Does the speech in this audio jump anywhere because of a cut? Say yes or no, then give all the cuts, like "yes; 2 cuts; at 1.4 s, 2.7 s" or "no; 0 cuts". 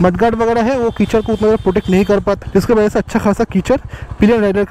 yes; 1 cut; at 2.4 s